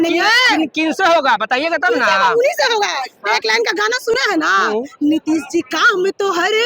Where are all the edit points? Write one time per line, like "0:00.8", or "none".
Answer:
none